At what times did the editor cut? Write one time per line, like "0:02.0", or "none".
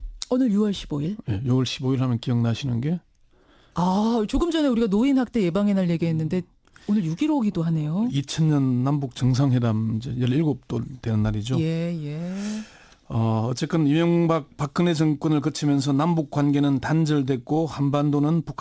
0:02.0